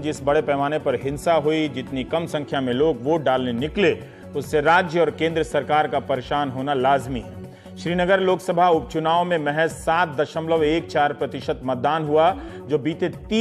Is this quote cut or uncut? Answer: uncut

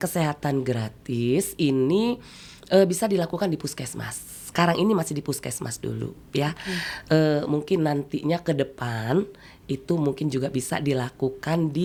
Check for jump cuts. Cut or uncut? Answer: uncut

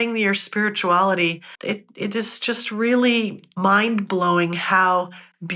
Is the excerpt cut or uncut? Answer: cut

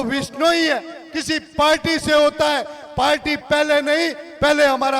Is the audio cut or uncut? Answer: uncut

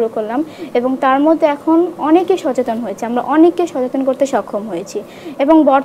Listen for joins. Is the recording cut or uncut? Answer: uncut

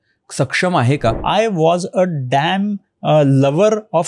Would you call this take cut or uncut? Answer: cut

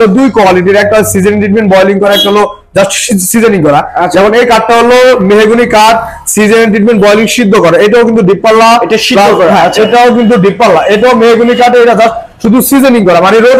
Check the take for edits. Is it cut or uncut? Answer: uncut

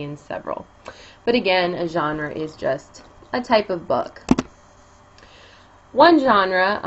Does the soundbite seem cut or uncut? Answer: cut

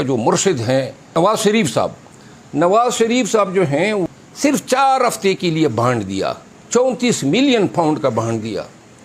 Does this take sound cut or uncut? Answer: cut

